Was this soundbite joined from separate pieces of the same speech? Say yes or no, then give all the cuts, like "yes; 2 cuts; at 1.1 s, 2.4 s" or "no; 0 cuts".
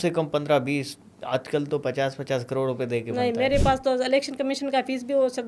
no; 0 cuts